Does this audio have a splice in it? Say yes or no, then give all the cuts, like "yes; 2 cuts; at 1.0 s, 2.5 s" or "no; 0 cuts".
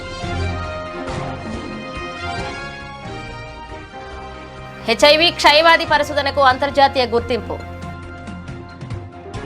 no; 0 cuts